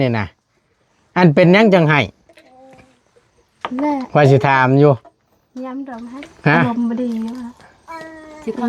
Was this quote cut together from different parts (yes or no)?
yes